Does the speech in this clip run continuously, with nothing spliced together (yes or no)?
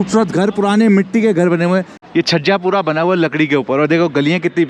no